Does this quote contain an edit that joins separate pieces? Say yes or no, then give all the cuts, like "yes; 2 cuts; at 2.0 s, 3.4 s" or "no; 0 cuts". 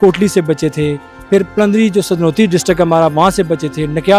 no; 0 cuts